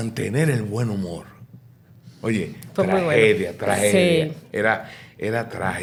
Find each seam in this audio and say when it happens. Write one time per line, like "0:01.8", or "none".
none